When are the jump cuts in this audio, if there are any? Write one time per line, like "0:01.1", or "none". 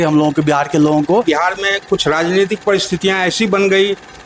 0:01.2